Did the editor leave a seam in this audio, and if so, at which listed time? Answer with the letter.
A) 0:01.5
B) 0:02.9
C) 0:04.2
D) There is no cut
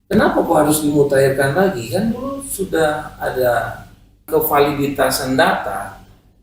C